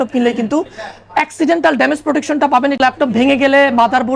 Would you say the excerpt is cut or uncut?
cut